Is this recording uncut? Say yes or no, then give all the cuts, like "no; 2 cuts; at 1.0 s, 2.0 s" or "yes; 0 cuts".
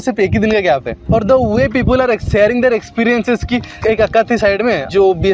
yes; 0 cuts